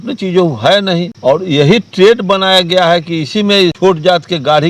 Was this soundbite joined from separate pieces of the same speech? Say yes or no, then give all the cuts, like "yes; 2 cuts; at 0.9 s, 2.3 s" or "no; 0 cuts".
yes; 2 cuts; at 1.1 s, 3.8 s